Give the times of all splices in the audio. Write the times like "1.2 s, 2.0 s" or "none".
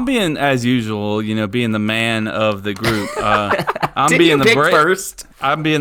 none